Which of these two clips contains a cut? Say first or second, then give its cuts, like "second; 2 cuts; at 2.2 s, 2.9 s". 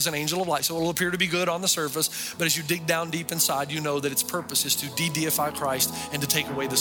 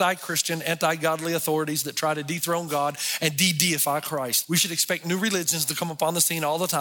second; 1 cut; at 4.4 s